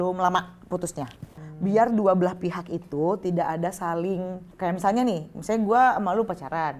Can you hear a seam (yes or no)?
yes